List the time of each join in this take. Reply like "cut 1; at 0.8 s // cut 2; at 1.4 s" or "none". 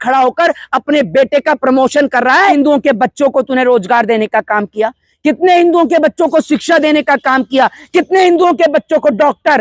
cut 1; at 2.5 s